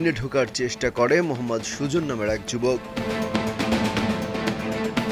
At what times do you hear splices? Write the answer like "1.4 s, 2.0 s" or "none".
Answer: none